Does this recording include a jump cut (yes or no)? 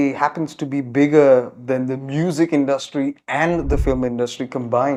no